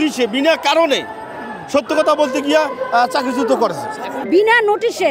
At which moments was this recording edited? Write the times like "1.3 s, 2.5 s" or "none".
4.2 s